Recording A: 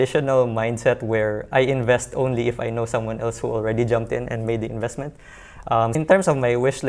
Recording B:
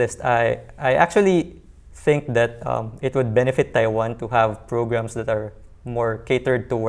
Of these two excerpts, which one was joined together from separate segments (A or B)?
A